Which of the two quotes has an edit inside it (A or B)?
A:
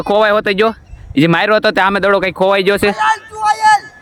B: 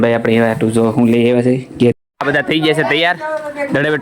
B